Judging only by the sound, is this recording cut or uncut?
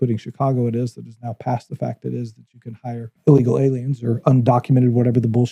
cut